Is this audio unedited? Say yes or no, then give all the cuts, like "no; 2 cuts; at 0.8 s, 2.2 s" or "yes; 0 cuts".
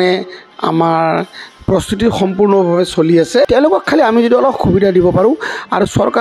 no; 1 cut; at 3.5 s